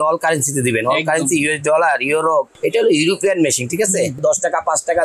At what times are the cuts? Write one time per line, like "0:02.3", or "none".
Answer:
0:02.5
0:04.2